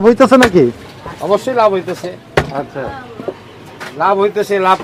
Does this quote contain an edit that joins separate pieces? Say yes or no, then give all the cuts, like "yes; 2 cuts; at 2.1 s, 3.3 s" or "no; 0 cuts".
no; 0 cuts